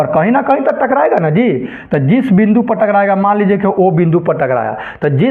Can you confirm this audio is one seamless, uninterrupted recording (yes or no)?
yes